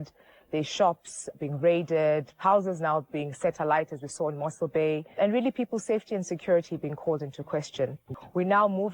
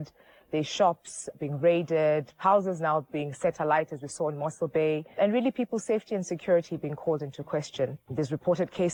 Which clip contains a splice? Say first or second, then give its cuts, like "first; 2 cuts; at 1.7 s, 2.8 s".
first; 1 cut; at 8.0 s